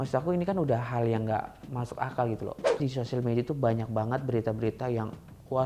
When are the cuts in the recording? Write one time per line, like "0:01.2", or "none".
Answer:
0:02.8